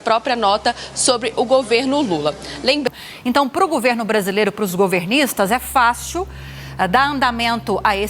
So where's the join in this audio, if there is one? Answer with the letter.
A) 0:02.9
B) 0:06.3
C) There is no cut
A